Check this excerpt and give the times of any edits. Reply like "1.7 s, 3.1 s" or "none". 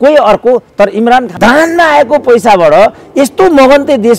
1.3 s